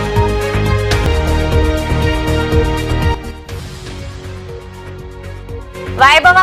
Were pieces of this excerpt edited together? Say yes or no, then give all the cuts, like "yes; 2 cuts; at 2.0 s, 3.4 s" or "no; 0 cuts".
no; 0 cuts